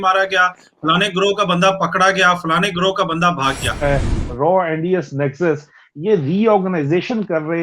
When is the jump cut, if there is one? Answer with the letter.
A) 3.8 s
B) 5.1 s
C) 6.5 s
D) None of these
A